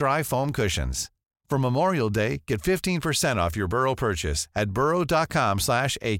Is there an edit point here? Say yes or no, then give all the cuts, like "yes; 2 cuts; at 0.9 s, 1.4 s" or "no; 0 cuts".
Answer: no; 0 cuts